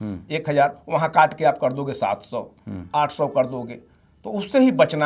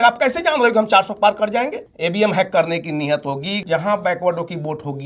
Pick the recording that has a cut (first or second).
second